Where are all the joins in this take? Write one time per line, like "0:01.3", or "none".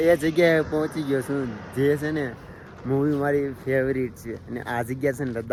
none

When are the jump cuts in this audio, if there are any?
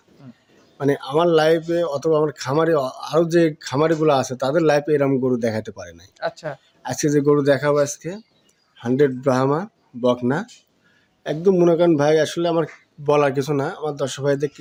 none

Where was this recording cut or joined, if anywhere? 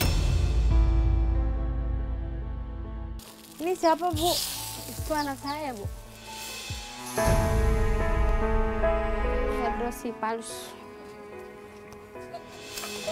0:09.7

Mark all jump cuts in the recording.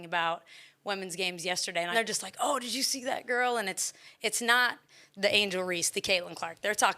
0:01.9

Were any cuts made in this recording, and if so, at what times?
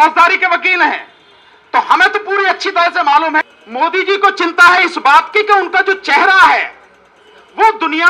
0:03.4

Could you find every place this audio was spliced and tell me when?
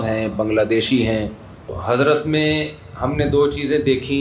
0:01.8

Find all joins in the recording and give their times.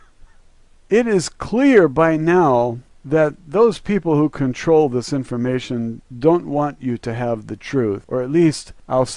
0:07.1

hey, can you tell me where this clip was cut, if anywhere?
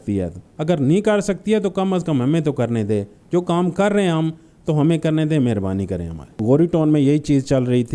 0:06.3

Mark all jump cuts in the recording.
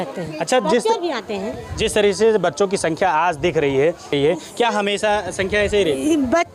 none

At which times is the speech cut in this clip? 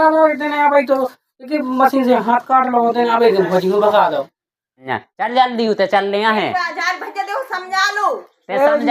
0:04.8

